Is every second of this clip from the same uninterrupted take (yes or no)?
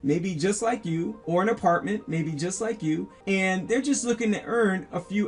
no